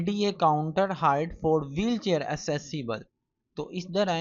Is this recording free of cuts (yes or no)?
yes